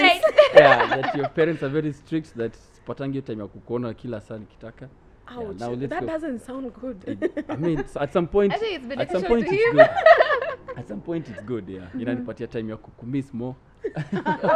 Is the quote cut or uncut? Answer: uncut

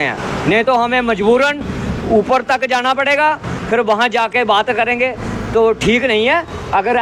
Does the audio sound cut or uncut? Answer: uncut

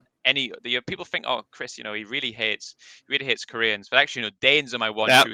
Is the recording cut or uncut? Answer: uncut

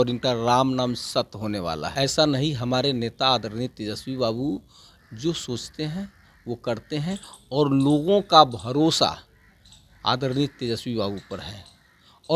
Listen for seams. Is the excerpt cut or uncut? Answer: cut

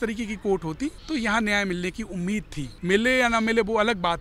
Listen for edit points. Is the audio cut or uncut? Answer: cut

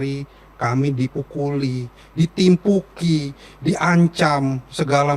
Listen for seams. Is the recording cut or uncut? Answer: uncut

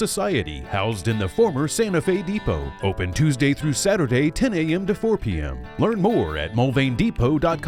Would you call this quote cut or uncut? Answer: uncut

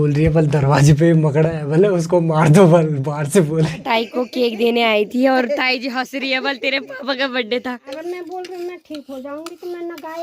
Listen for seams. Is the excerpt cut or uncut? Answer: cut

